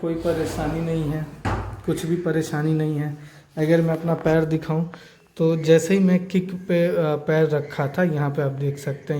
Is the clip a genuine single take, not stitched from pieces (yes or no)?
yes